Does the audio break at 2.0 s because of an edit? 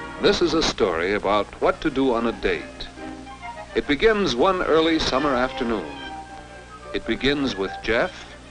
yes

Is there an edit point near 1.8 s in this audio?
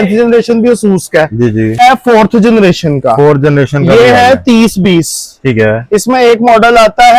yes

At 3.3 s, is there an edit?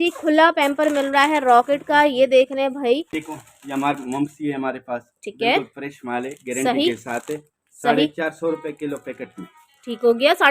yes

